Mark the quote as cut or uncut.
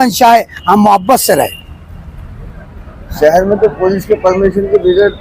uncut